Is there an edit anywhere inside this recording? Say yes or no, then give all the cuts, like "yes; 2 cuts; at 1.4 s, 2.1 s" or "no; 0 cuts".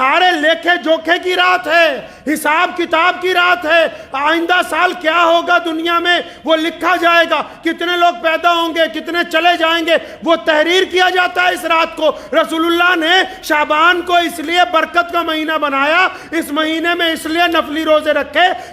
no; 0 cuts